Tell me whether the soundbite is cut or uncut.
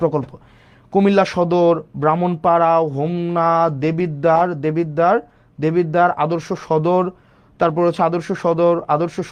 uncut